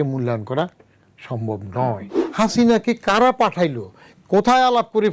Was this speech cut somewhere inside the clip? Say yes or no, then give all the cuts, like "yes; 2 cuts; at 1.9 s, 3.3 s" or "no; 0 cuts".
yes; 1 cut; at 2.2 s